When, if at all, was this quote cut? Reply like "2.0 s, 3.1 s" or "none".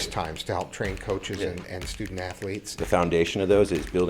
2.7 s